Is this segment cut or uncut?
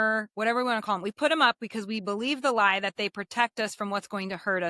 uncut